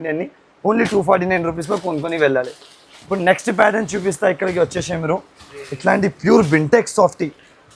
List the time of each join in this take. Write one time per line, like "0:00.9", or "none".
none